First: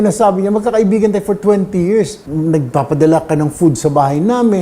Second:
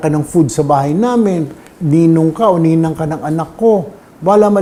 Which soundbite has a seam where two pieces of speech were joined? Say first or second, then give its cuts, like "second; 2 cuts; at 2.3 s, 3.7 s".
first; 1 cut; at 2.2 s